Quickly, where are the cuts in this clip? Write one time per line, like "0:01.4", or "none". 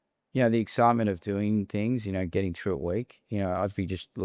none